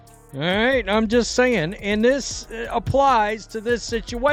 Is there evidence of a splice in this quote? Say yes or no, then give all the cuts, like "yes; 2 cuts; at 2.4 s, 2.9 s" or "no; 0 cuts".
no; 0 cuts